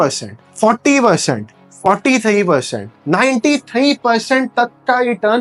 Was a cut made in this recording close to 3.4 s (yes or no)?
no